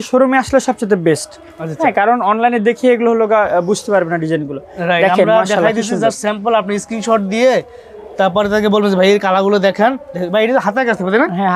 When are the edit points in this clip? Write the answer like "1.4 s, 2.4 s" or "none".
none